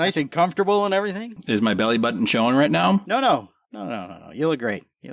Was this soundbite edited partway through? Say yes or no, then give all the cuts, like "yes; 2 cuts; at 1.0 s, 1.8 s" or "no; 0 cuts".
yes; 2 cuts; at 1.4 s, 3.0 s